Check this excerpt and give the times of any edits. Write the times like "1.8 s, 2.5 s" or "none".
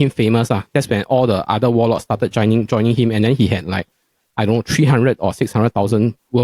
none